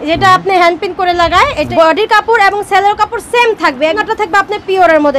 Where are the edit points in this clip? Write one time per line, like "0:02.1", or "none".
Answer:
0:01.7
0:04.0